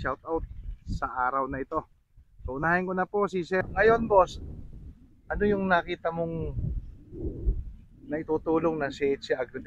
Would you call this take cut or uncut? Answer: cut